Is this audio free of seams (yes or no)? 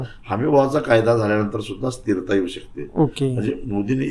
yes